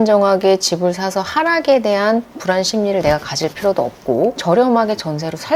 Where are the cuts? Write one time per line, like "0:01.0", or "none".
0:04.4